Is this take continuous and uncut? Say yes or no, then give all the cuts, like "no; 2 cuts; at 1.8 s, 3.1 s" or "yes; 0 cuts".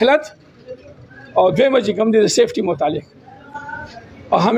yes; 0 cuts